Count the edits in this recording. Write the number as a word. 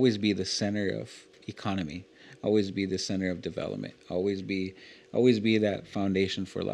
one